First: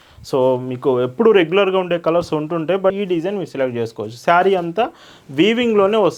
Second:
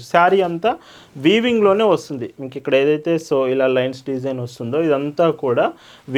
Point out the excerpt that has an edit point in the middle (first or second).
first